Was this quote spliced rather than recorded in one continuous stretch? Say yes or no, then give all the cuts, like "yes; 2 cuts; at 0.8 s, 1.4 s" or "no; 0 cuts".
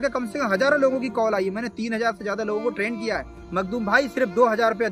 yes; 1 cut; at 3.3 s